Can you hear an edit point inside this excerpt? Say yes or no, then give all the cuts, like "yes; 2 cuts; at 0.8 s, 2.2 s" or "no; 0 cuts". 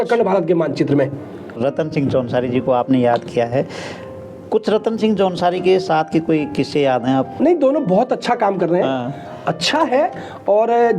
yes; 2 cuts; at 1.6 s, 7.4 s